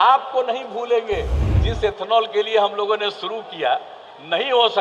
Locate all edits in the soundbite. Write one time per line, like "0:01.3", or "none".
0:01.4